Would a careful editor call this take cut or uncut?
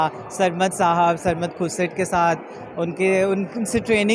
uncut